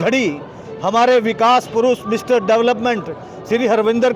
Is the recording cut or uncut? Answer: uncut